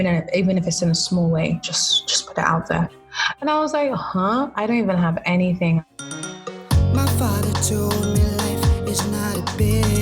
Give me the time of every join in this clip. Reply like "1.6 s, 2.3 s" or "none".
5.8 s